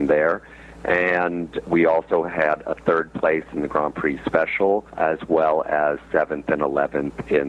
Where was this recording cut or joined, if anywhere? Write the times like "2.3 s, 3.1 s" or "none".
1.6 s, 4.9 s